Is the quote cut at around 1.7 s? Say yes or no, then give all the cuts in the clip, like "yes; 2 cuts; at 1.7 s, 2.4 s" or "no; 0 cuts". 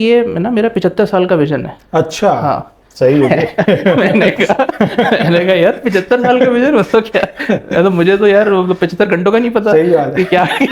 no; 0 cuts